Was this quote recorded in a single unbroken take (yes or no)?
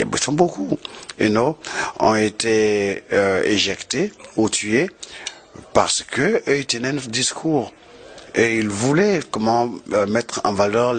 yes